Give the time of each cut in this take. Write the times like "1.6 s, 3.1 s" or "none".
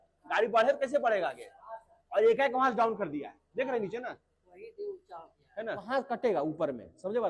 5.8 s